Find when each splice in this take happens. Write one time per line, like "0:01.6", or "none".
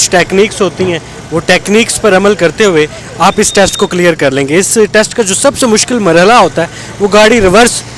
none